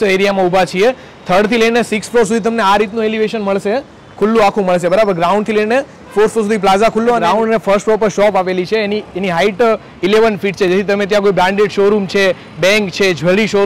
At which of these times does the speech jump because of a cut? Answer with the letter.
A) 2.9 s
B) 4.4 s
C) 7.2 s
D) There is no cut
C